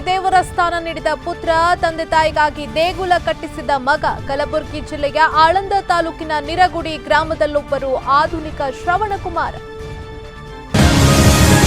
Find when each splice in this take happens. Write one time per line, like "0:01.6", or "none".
0:10.7

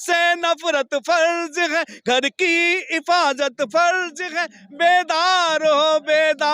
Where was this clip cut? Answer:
none

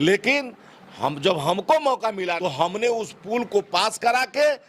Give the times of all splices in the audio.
0:02.4

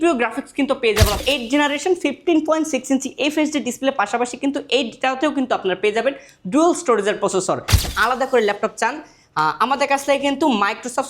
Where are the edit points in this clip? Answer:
0:01.2
0:07.9

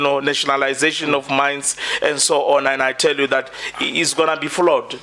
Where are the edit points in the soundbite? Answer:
none

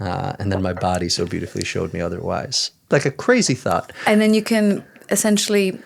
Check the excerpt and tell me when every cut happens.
0:02.6

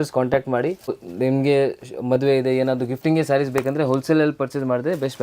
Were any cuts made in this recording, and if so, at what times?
0:00.9

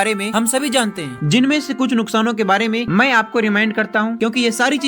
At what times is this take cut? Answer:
none

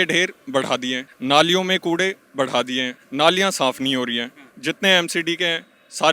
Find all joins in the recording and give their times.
0:01.1
0:03.0

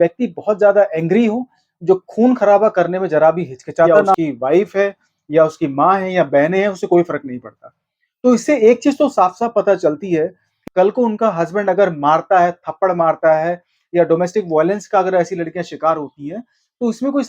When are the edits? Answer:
0:04.1
0:10.5

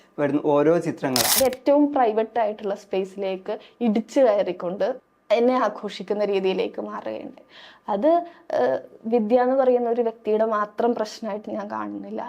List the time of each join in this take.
0:01.3
0:05.1

